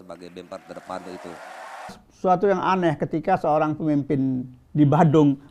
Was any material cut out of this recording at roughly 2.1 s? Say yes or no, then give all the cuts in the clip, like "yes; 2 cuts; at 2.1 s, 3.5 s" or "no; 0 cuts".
yes; 1 cut; at 2.1 s